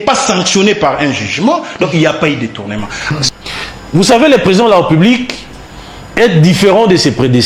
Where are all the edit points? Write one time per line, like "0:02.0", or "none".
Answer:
0:03.3